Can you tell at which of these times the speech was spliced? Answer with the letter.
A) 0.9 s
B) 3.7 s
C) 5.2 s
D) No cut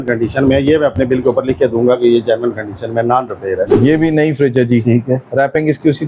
B